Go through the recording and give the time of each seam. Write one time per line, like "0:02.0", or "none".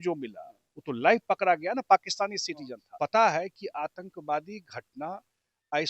0:02.8